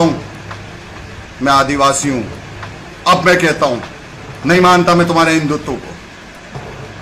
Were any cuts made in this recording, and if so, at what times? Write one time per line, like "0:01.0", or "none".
none